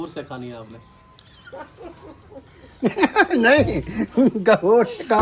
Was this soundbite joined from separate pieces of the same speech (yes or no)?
no